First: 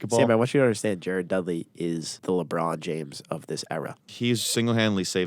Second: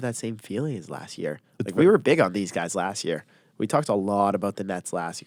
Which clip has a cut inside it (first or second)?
first